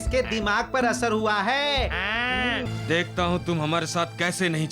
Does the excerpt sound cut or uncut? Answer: cut